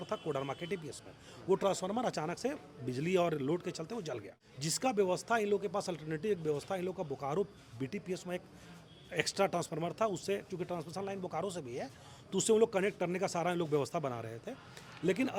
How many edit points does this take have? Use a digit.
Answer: 0